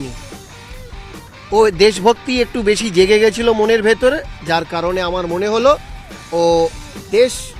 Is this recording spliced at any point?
no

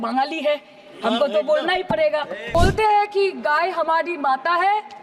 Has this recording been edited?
yes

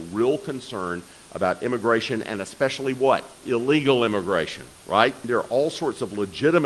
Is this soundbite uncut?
no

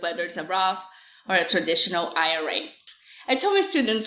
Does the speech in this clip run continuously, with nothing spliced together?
no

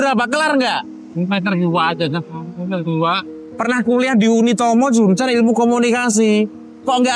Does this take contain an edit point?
yes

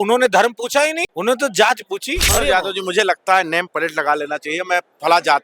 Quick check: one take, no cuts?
no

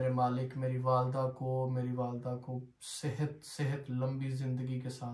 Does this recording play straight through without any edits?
yes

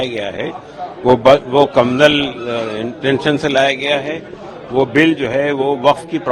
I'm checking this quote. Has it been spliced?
no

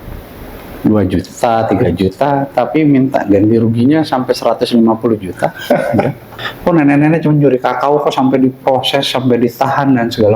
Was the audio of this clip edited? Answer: yes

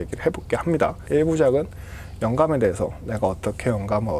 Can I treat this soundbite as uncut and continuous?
no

